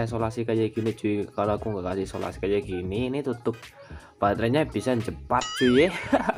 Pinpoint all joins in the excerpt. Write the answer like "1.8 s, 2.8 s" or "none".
none